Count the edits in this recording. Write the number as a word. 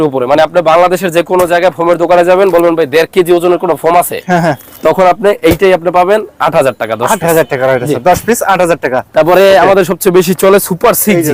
zero